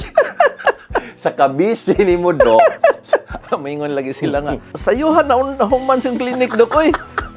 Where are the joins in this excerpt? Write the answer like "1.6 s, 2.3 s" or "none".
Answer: 3.3 s, 4.7 s

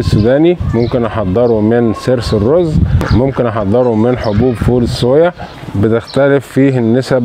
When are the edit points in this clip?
5.5 s

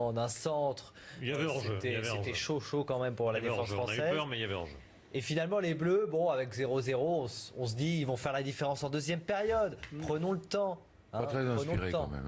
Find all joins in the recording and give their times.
7.5 s

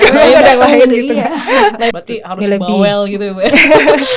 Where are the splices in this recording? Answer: 1.9 s

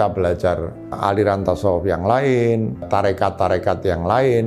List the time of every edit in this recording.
1.0 s, 2.8 s

